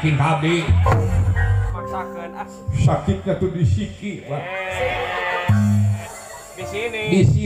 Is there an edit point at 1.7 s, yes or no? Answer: yes